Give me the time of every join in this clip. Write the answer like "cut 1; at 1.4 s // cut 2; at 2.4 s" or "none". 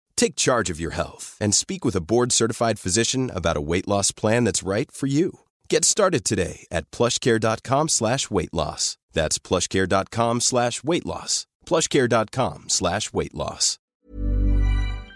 cut 1; at 13.9 s